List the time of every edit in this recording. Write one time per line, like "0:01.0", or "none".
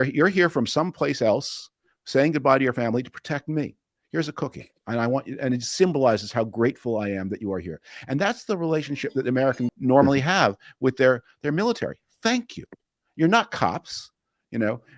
0:09.8